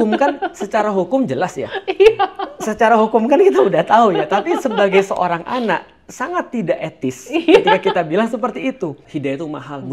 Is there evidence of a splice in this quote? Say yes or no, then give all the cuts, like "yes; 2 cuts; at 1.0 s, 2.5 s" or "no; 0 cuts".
yes; 1 cut; at 9.0 s